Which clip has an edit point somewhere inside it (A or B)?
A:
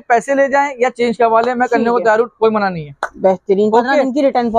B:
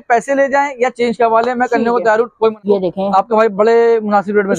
B